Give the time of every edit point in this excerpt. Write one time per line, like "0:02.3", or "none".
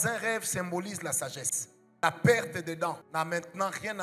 0:03.0